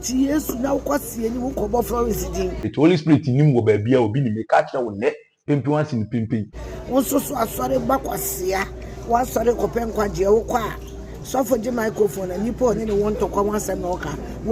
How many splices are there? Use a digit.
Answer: 2